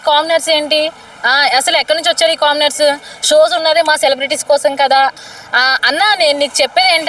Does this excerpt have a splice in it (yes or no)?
yes